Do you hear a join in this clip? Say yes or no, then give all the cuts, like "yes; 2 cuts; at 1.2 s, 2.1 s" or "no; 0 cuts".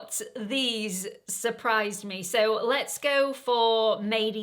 no; 0 cuts